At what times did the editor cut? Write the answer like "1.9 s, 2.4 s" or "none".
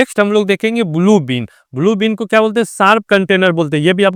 none